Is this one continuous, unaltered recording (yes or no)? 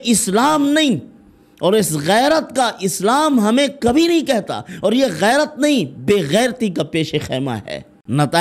yes